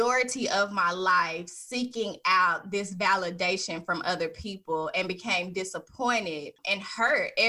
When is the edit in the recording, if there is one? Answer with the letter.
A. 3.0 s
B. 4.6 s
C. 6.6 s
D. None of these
C